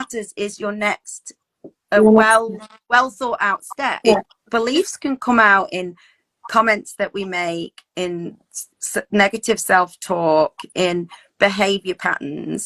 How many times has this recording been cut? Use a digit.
1